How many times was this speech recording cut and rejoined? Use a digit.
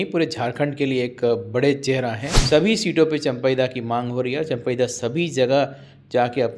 1